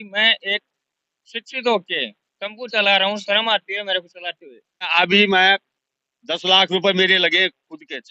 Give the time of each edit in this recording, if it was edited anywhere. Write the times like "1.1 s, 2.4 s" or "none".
4.9 s